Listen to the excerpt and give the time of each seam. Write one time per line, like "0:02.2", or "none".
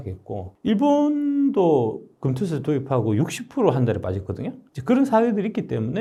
none